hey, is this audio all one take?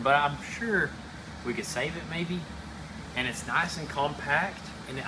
yes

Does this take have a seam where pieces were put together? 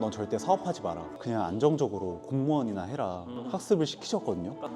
yes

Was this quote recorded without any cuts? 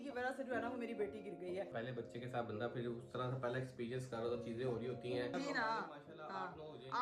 no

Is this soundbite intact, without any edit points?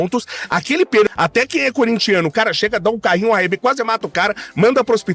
no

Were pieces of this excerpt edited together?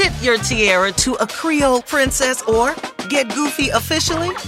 no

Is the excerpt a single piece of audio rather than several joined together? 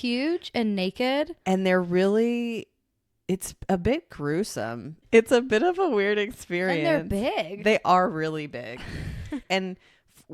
no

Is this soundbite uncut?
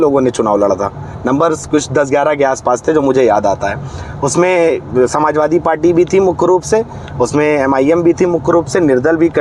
yes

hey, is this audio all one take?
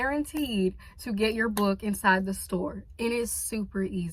yes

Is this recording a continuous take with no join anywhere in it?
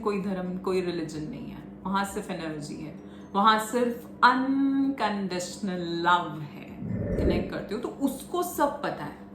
no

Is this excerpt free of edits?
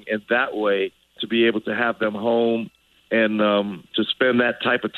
no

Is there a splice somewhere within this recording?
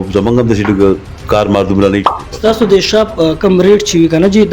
yes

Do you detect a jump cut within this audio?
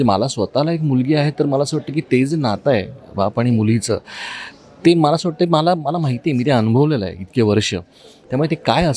no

